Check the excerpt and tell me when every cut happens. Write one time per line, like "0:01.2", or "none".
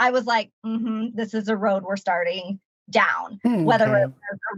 none